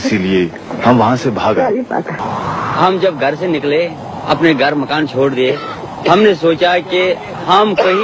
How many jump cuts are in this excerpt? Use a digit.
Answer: 1